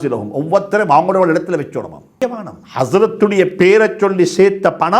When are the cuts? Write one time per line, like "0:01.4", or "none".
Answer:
0:02.2